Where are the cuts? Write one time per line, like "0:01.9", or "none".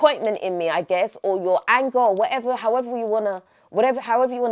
none